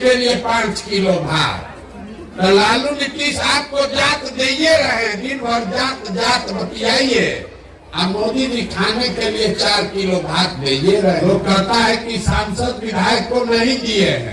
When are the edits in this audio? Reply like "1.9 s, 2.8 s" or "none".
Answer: 11.2 s